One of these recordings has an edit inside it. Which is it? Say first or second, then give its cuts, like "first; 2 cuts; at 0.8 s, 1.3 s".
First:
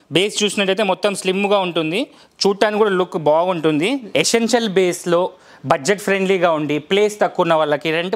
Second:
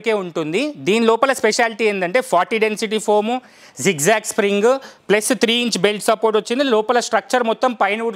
first; 1 cut; at 4.0 s